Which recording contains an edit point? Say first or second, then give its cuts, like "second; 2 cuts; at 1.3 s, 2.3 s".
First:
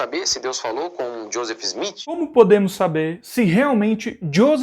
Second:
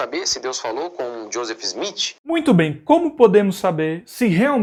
first; 1 cut; at 2.2 s